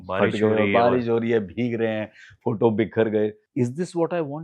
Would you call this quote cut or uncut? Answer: cut